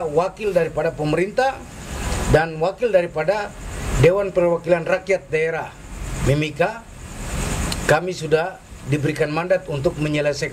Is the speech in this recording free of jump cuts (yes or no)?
yes